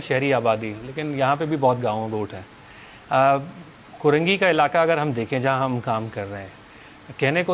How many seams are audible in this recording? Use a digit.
0